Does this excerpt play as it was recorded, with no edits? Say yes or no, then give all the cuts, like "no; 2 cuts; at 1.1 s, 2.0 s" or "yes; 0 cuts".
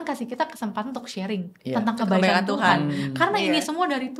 yes; 0 cuts